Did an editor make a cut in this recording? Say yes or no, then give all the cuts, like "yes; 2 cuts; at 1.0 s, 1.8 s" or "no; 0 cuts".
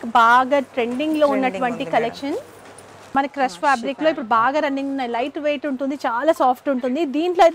yes; 1 cut; at 3.0 s